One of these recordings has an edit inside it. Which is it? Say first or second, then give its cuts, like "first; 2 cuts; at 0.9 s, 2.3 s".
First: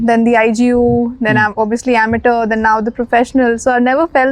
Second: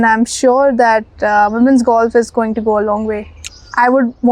second; 1 cut; at 3.3 s